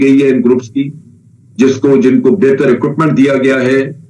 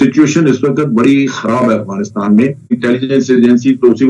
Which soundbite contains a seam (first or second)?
second